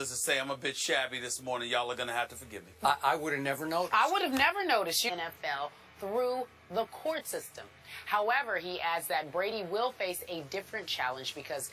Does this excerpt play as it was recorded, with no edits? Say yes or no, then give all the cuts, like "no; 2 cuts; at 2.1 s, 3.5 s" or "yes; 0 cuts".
yes; 0 cuts